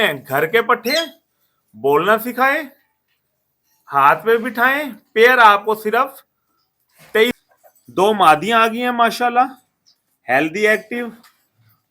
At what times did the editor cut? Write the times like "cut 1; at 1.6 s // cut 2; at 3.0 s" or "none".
cut 1; at 7.4 s